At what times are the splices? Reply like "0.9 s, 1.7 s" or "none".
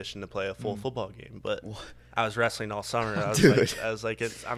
none